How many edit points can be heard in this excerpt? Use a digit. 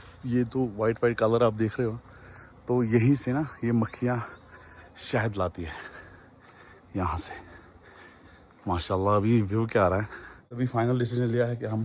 1